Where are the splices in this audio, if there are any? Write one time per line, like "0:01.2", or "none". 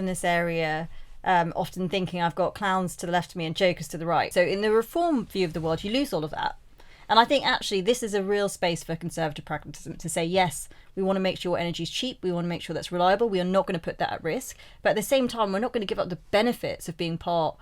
0:04.3